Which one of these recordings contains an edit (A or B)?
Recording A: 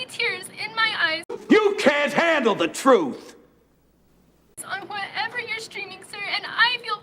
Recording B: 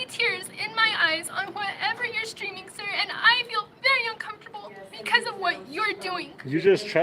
B